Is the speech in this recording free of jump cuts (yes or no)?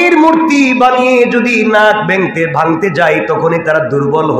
yes